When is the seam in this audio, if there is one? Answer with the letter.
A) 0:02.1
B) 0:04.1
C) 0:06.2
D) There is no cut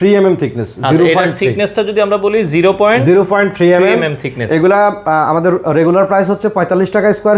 D